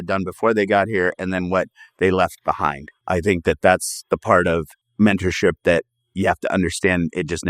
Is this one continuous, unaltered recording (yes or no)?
no